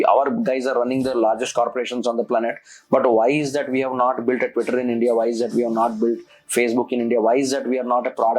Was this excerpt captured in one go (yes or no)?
yes